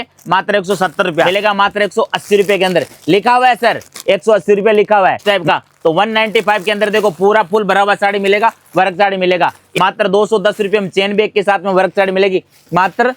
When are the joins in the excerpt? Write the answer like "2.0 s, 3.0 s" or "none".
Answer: 1.3 s, 5.2 s, 9.6 s